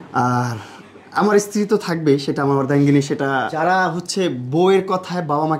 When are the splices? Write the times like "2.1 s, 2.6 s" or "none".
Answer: 3.5 s